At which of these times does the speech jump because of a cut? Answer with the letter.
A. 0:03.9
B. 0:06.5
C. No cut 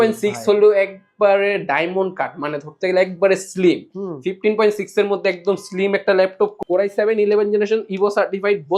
B